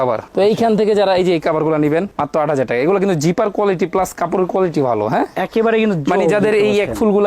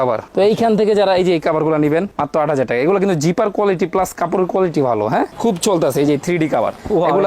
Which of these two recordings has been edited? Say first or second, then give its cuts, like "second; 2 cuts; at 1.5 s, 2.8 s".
second; 1 cut; at 5.3 s